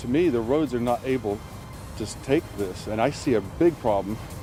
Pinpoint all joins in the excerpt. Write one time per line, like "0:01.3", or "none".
none